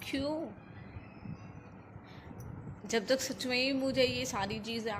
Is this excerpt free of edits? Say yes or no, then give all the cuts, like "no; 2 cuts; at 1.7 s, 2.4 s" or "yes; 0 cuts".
yes; 0 cuts